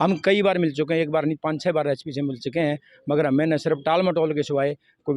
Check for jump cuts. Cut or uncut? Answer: uncut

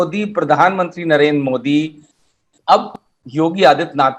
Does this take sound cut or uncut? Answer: uncut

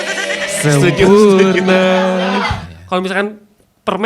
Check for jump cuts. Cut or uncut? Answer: cut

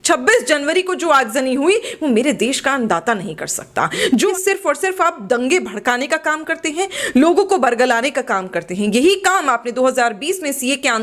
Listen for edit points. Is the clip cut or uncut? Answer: cut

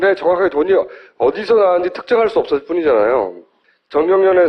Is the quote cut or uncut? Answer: uncut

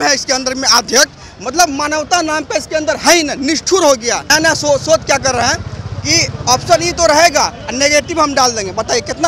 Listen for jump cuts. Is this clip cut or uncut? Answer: cut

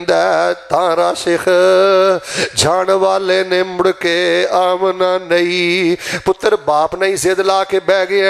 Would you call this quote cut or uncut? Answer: uncut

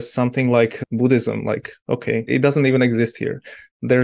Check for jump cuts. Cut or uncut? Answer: cut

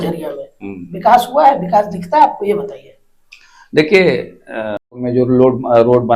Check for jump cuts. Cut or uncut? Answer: cut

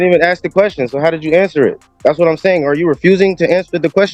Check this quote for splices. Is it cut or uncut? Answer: uncut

